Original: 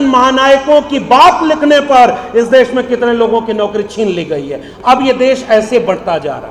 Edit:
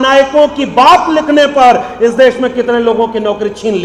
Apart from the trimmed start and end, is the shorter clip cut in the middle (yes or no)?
no